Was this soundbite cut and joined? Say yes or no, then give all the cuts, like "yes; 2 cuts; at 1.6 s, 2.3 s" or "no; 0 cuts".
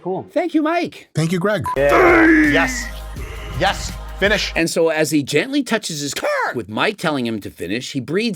yes; 1 cut; at 1.7 s